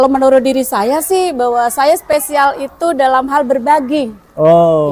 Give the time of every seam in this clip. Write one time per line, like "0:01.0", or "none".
none